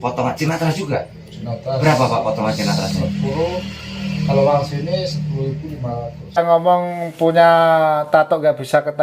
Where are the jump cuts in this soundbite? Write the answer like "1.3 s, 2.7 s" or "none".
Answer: 6.4 s